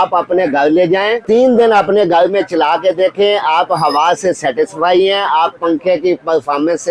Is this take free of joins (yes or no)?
no